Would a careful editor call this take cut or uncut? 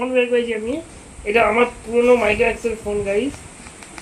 uncut